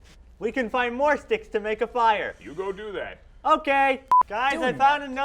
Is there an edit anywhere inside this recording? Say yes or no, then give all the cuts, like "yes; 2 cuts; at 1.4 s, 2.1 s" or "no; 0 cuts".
yes; 1 cut; at 4.2 s